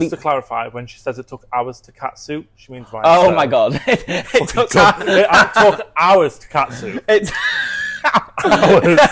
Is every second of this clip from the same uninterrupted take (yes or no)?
yes